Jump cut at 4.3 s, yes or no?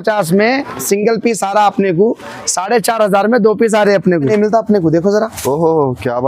yes